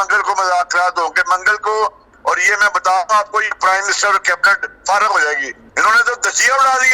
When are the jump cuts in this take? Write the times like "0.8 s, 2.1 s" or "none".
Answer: 2.1 s, 5.6 s